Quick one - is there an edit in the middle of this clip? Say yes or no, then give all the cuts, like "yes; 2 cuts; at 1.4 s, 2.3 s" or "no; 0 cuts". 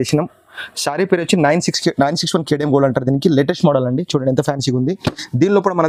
no; 0 cuts